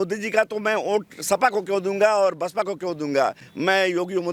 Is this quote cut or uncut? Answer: uncut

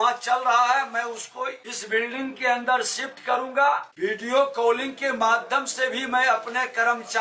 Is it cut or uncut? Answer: cut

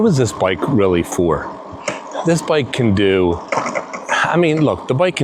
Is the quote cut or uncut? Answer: uncut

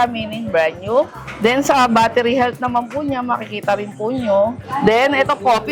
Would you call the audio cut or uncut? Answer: cut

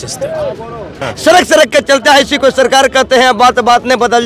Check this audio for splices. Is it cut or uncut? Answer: cut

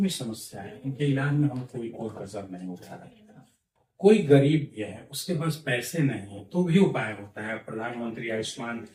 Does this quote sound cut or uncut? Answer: uncut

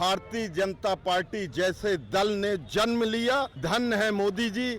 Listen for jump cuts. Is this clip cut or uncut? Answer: cut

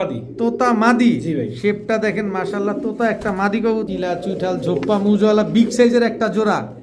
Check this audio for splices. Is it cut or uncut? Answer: cut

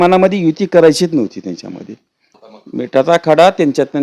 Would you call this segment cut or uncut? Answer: cut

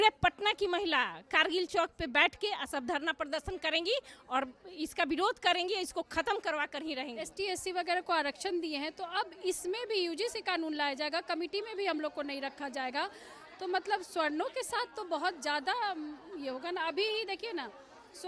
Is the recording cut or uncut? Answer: cut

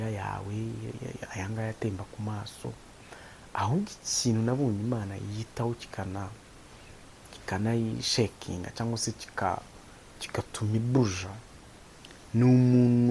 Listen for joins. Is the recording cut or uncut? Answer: uncut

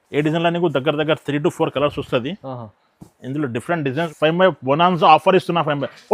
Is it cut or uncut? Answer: cut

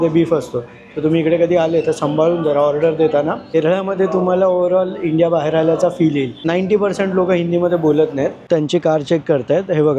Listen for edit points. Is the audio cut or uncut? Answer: cut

